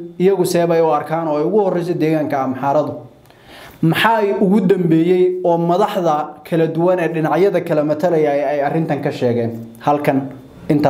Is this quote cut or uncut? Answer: uncut